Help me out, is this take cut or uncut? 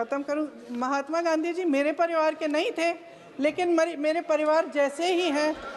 uncut